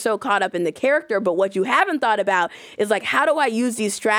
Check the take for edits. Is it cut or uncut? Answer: uncut